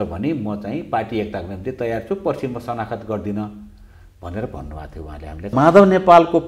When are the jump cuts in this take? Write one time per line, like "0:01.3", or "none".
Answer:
0:05.5